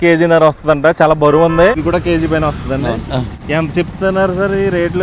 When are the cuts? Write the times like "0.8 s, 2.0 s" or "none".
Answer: 1.8 s, 3.3 s